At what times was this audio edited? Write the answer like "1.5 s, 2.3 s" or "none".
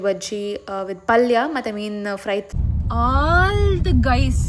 2.5 s